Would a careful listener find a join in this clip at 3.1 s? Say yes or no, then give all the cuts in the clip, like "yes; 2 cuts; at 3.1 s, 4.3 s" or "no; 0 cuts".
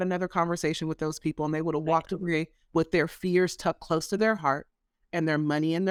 no; 0 cuts